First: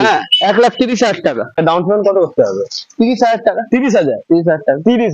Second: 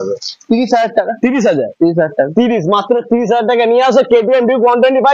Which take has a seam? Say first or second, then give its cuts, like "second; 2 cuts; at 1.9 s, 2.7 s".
first; 1 cut; at 1.6 s